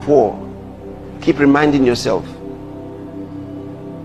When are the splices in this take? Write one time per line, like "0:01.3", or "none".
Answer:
none